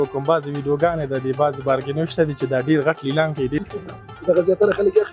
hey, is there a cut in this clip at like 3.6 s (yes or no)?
yes